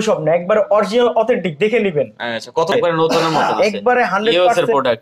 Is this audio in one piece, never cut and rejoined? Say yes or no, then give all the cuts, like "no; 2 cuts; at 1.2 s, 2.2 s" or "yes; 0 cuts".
no; 1 cut; at 2.7 s